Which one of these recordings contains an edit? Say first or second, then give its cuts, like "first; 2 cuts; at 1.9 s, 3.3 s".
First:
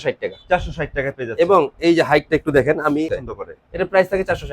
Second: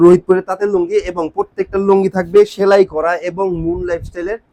first; 1 cut; at 3.1 s